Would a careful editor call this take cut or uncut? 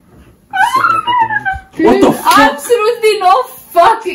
cut